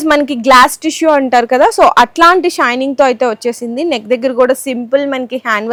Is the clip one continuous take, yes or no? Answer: yes